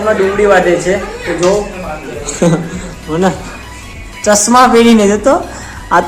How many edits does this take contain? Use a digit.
0